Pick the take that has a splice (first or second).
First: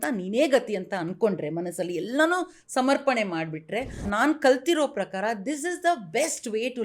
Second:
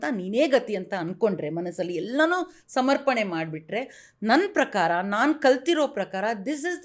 first